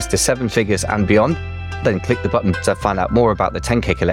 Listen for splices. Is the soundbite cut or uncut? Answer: uncut